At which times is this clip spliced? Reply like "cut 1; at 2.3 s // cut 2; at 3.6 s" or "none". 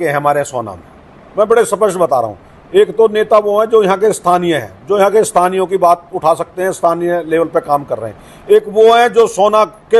none